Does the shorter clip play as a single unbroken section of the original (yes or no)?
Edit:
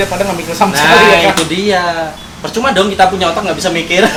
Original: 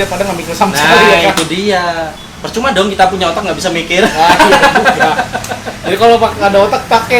yes